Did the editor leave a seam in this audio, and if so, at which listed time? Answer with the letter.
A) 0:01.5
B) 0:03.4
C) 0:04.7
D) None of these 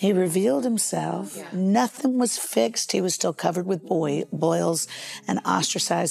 A